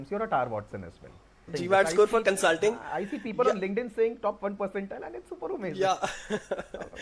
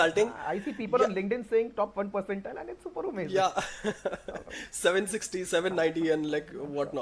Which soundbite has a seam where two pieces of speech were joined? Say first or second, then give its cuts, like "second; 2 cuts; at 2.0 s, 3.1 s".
first; 1 cut; at 1.5 s